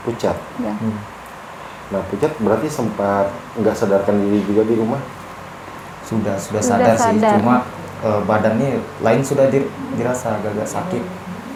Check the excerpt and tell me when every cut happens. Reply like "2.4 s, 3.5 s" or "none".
none